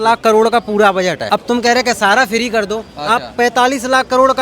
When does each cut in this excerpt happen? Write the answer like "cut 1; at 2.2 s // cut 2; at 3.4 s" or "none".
cut 1; at 1.2 s